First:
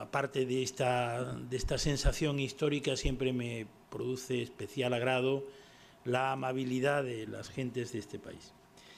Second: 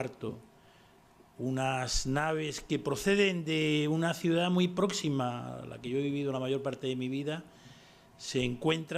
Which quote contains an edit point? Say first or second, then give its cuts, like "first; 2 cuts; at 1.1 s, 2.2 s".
second; 1 cut; at 2.3 s